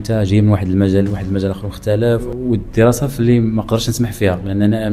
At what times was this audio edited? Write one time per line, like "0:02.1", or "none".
0:02.3

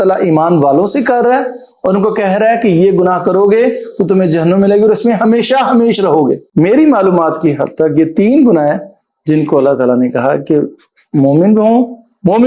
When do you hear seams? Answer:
0:06.4

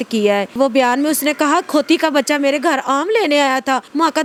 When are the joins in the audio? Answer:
none

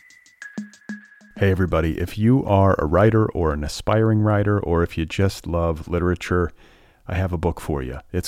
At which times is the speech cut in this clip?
0:00.9

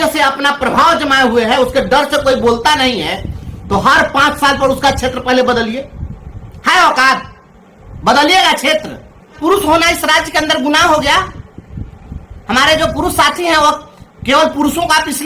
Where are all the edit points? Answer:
0:09.4

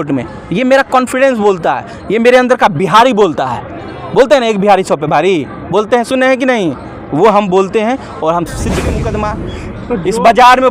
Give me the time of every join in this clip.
0:09.0

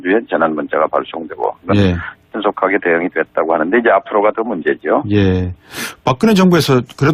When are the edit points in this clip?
0:06.1

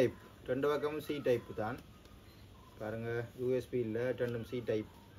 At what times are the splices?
none

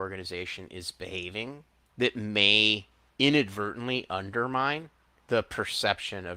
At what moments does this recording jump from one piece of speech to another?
0:01.8
0:03.0
0:05.1

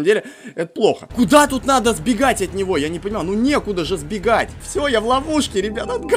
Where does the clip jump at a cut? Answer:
0:01.0
0:04.6

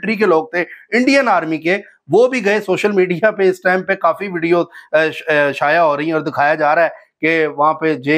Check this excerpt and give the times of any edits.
none

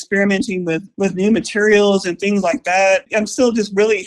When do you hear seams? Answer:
0:00.9
0:03.1

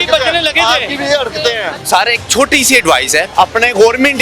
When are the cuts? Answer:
0:01.7
0:03.3

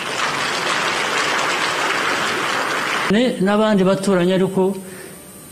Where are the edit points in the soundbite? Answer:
0:03.1

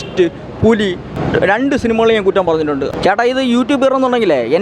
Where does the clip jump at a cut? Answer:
0:01.1
0:02.4

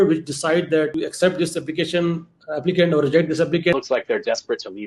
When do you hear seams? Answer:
0:00.9
0:03.7

